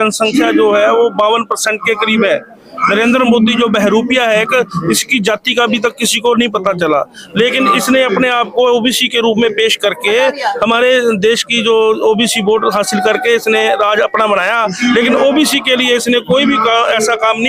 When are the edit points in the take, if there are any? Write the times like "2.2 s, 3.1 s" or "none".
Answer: none